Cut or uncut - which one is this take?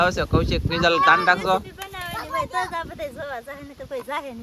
uncut